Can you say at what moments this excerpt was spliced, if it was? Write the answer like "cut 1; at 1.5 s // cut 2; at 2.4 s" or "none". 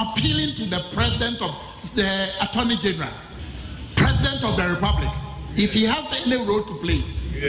none